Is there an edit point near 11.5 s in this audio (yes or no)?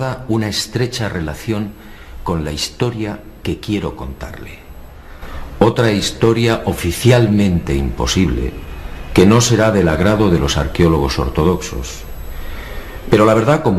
yes